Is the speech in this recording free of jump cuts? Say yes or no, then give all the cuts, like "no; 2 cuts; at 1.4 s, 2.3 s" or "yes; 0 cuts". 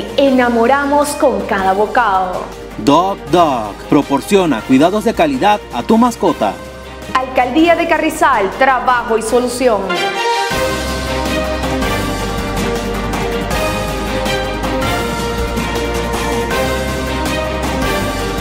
no; 1 cut; at 9.9 s